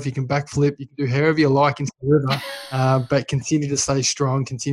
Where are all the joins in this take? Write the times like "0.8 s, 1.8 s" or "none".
none